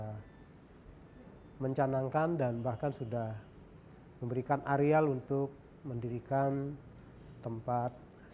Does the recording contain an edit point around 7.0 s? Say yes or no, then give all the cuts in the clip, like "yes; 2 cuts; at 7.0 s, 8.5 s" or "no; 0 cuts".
no; 0 cuts